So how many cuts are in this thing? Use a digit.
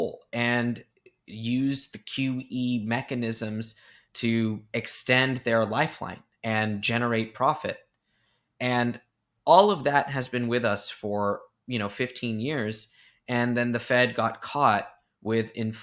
0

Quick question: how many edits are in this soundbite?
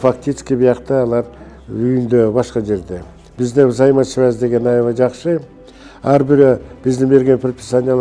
1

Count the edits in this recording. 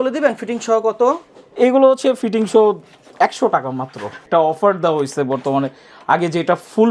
1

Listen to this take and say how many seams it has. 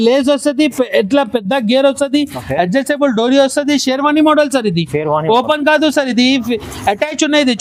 0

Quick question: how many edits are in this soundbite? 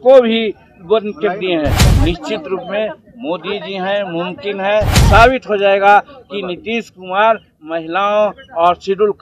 2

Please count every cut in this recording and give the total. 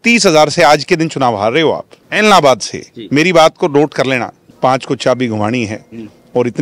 2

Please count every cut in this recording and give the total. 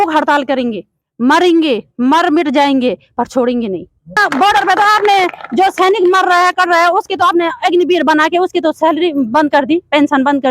1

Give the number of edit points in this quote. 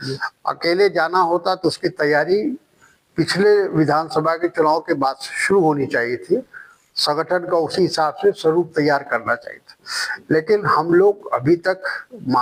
0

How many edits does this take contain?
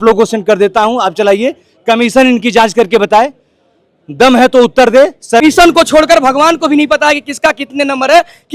1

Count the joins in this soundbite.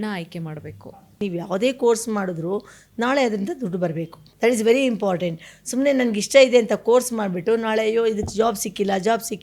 2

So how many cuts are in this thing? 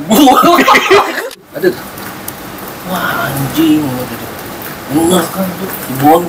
1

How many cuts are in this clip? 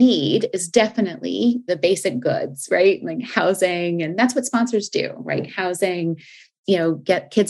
2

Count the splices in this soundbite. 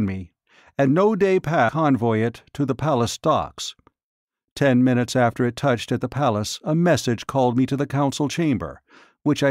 0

